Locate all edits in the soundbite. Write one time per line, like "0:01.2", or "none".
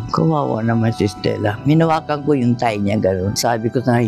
none